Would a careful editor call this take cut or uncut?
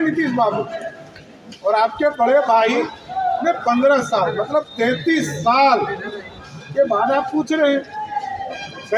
uncut